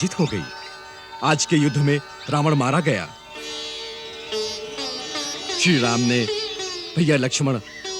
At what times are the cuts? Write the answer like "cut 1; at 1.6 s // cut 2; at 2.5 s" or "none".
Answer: none